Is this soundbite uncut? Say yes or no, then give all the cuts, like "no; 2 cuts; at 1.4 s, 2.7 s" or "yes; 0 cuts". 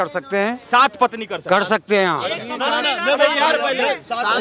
yes; 0 cuts